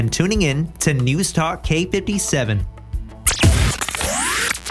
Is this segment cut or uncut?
cut